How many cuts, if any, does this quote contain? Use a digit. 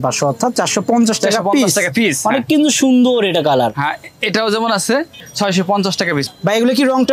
0